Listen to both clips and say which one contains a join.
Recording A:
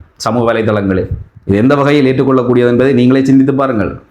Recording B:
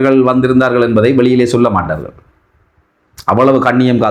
A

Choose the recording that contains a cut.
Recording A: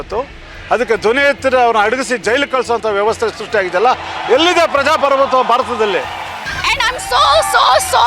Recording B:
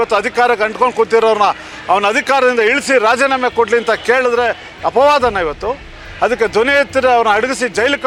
A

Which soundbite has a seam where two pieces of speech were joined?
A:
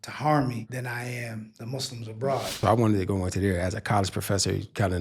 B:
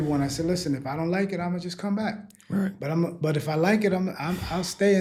A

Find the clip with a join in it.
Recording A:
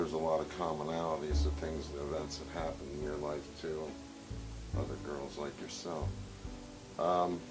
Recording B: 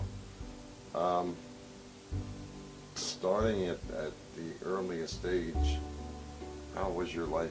A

